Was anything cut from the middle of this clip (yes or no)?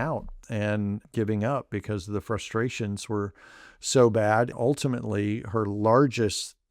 yes